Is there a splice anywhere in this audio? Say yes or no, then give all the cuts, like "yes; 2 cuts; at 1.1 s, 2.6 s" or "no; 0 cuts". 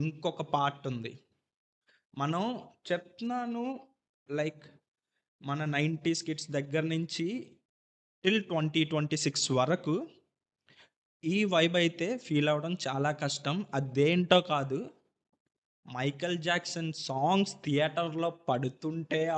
no; 0 cuts